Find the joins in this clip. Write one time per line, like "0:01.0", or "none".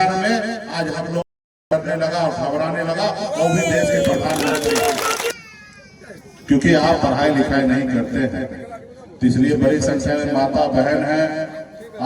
0:05.3

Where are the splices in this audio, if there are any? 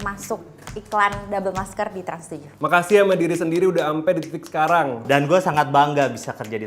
0:02.5
0:05.0

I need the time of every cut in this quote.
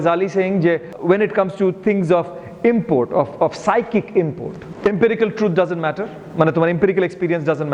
0:00.9
0:04.7

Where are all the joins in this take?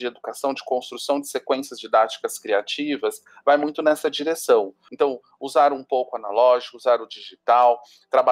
0:04.8

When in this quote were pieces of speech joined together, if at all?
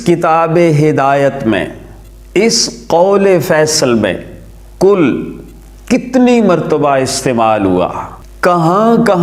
none

